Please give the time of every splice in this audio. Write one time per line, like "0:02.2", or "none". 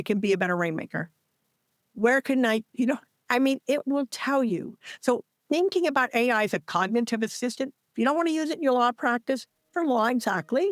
none